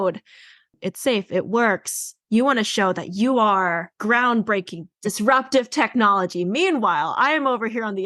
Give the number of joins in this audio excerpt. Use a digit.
3